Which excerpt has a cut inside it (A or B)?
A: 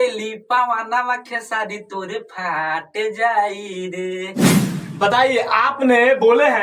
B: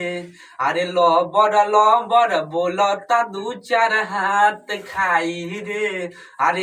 A